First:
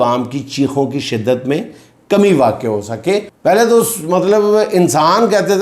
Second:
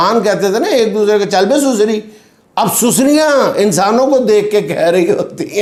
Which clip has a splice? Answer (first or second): first